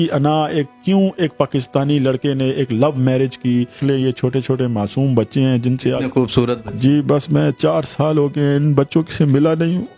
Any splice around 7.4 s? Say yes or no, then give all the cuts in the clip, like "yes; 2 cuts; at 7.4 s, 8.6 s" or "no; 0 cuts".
no; 1 cut; at 3.8 s